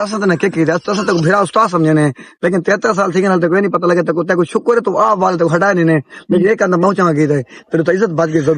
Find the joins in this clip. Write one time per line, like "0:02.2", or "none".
none